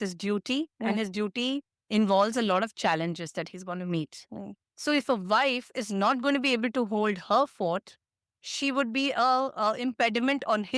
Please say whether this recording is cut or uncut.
uncut